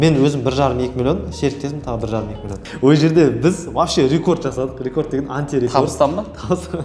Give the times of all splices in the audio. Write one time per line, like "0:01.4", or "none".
0:02.5